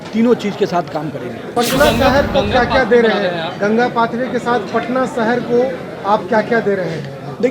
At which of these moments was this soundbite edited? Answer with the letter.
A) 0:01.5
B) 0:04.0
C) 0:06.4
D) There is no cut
A